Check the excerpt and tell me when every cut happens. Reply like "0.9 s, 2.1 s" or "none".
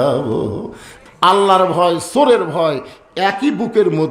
0.9 s